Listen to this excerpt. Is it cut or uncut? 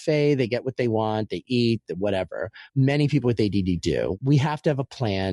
cut